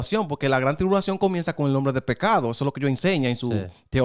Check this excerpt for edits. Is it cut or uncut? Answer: uncut